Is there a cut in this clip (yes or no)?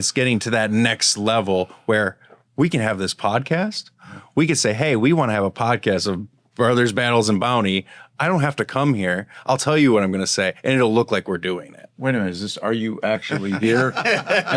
no